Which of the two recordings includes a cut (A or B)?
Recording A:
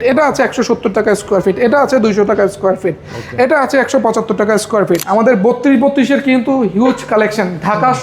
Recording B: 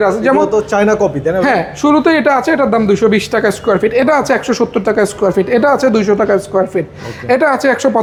A